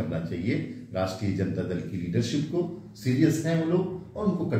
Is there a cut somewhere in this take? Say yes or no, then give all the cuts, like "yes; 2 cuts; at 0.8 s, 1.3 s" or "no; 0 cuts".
no; 0 cuts